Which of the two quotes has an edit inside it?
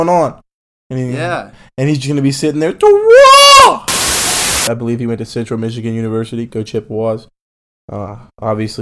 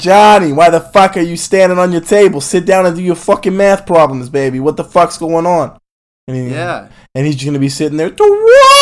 first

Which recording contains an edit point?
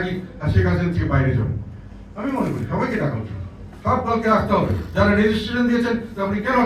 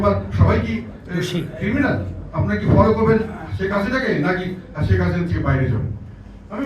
second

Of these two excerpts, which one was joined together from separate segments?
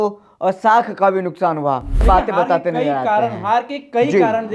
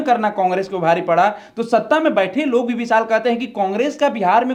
first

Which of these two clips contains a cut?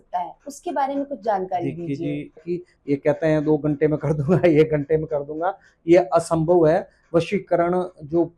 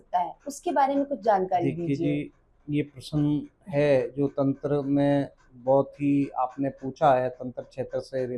first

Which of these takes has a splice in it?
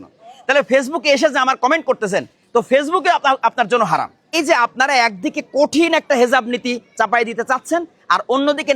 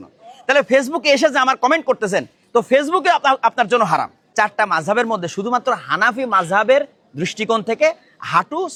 first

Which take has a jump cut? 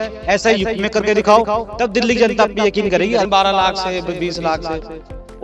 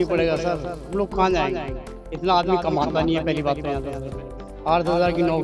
first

